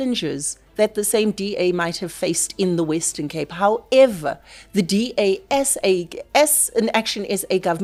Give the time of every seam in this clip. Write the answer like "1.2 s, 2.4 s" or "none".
none